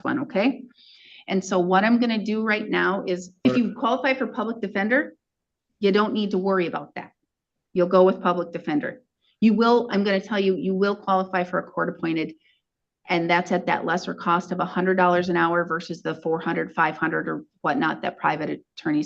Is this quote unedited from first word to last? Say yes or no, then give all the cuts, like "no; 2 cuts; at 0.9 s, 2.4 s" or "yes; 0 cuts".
no; 1 cut; at 3.4 s